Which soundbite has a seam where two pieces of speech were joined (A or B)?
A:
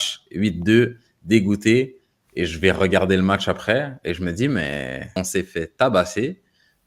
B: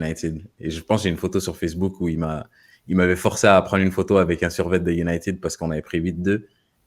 A